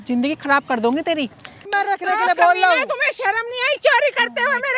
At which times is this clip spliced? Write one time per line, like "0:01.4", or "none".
0:01.6